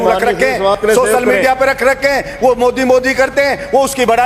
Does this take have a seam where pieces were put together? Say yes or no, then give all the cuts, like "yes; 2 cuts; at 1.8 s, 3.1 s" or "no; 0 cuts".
no; 0 cuts